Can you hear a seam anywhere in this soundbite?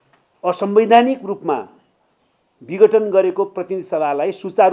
no; 0 cuts

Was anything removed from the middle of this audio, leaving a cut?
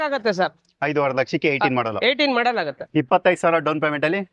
yes; 1 cut; at 2.8 s

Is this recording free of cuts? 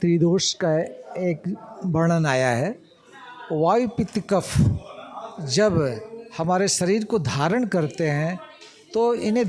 yes; 0 cuts

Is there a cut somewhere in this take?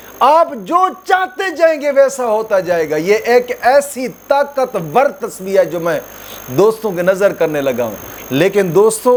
no; 0 cuts

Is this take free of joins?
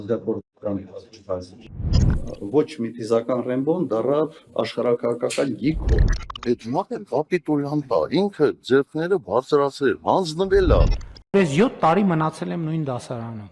yes; 0 cuts

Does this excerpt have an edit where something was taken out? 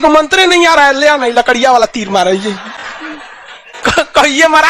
no; 0 cuts

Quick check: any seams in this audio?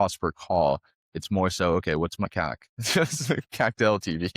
yes; 1 cut; at 2.3 s

